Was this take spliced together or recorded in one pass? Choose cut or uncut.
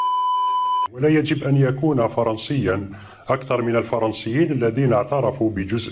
cut